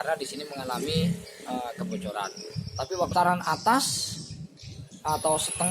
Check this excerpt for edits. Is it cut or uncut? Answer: cut